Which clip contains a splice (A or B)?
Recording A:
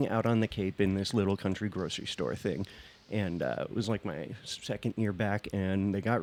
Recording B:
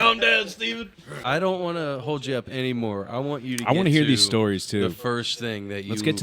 B